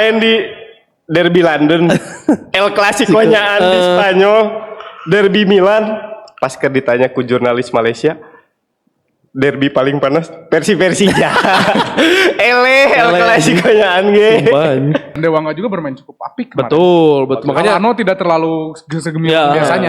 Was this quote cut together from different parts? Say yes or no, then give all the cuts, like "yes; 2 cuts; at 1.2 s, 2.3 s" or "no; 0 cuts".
yes; 1 cut; at 15.1 s